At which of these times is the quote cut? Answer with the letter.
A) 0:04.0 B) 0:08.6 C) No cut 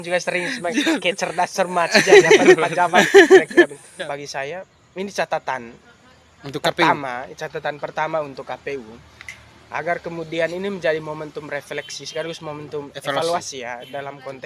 A